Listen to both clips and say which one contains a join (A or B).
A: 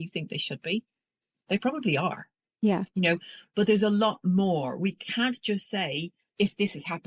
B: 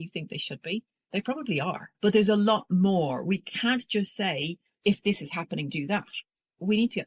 B